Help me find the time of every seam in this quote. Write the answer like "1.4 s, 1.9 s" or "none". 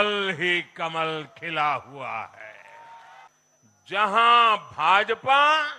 3.3 s